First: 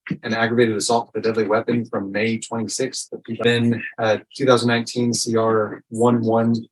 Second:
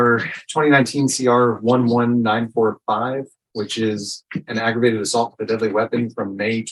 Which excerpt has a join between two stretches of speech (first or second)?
first